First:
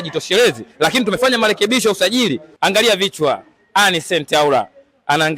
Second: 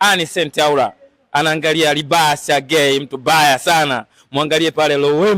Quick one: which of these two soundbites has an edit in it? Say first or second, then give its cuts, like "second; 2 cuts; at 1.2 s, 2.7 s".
first; 1 cut; at 2.5 s